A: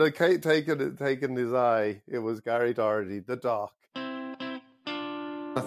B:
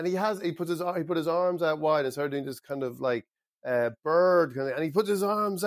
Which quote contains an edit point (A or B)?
A